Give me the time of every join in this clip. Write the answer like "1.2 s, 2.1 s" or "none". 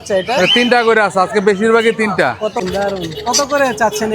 2.6 s